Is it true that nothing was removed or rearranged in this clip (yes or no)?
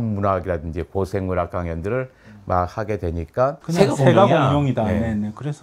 no